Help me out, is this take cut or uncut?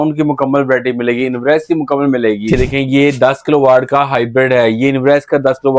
cut